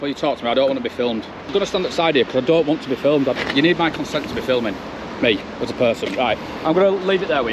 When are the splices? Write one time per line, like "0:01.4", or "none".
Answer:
0:01.5
0:03.4